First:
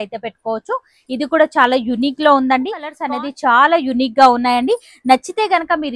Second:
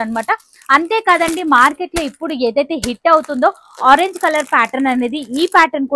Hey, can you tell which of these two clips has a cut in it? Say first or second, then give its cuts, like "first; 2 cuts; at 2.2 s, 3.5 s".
first; 1 cut; at 2.9 s